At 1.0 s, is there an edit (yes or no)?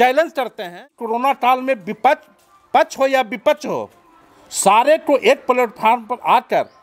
yes